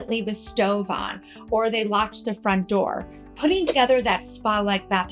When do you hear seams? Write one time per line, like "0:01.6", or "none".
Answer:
0:03.3